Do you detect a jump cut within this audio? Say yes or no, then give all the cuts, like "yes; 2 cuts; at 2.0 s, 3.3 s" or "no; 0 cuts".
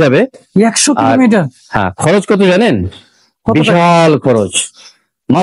no; 0 cuts